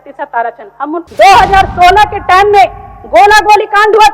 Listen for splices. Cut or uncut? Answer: cut